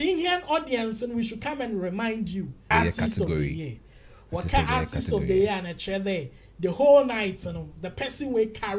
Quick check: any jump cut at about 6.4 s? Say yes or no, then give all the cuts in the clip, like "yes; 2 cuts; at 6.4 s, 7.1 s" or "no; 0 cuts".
no; 1 cut; at 2.7 s